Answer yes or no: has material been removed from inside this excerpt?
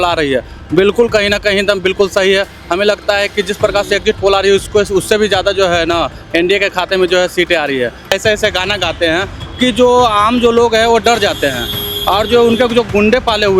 yes